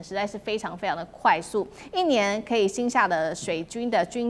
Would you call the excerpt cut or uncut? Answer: uncut